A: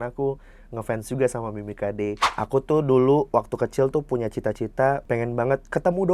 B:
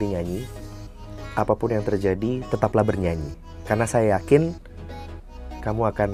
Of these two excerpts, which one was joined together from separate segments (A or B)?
A